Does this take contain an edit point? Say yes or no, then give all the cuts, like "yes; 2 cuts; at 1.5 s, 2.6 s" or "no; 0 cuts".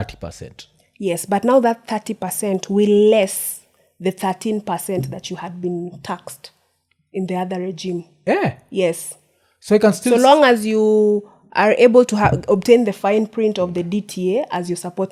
no; 0 cuts